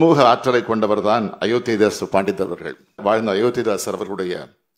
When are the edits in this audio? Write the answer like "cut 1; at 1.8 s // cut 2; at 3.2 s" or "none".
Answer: cut 1; at 3.0 s